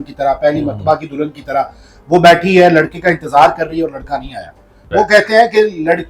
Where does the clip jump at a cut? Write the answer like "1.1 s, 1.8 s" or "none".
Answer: 4.7 s

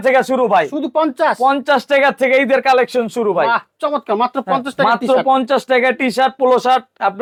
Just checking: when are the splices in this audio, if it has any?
none

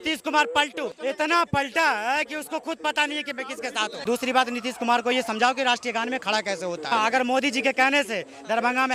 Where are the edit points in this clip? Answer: 0.9 s, 4.0 s, 6.9 s

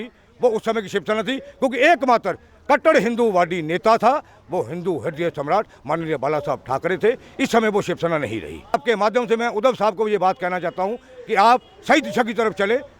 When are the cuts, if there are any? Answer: 8.7 s

